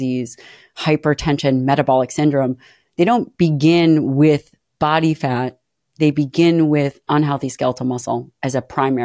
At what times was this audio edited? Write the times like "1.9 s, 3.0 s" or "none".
none